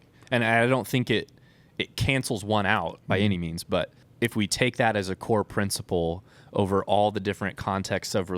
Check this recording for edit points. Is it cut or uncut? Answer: cut